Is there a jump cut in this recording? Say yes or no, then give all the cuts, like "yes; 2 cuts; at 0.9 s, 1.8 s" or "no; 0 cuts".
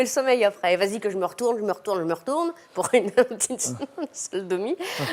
no; 0 cuts